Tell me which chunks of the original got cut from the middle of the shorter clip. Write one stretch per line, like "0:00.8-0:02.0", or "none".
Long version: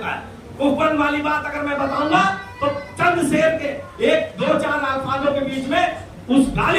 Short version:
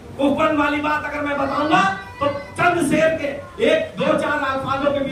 none